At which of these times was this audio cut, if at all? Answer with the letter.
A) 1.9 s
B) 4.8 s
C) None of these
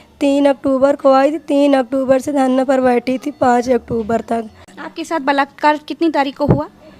B